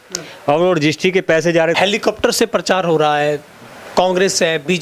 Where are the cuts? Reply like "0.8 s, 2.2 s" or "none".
1.8 s